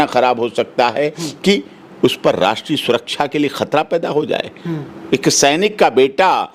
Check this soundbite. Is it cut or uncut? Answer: uncut